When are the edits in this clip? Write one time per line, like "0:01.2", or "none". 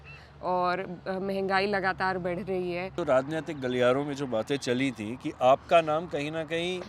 0:02.9